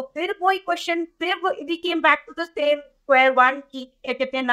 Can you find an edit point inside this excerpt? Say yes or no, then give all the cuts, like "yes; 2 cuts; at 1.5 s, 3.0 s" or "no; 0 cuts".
no; 0 cuts